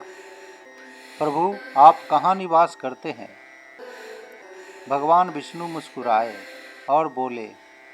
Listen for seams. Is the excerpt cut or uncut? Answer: cut